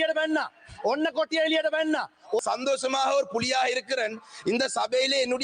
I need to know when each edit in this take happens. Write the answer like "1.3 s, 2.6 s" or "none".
2.4 s

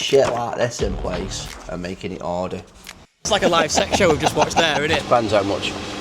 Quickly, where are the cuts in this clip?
3.3 s, 5.0 s

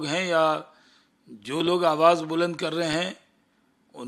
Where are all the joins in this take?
none

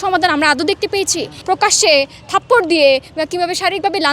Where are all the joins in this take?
1.4 s

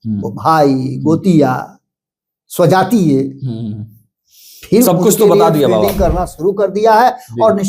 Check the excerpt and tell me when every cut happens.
none

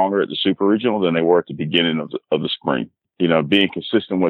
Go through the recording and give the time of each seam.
3.0 s

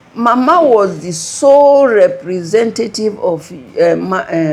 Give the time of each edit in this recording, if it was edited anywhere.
none

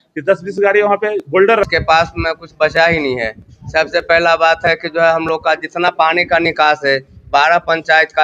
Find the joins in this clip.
1.6 s

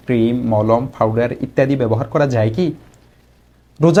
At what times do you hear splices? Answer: none

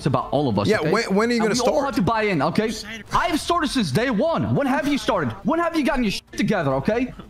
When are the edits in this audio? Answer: none

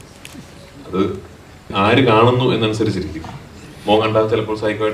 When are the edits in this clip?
1.7 s

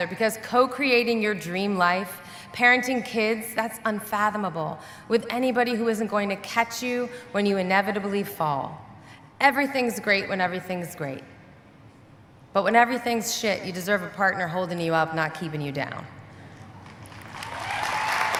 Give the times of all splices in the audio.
none

